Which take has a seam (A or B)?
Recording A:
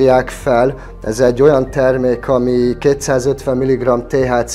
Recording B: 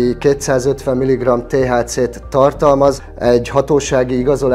B